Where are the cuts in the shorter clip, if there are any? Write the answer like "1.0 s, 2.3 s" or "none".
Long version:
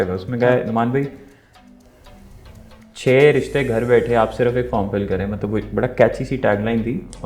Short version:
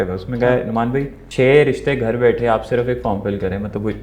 1.2 s